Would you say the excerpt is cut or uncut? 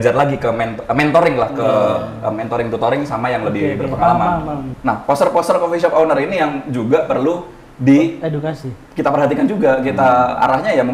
cut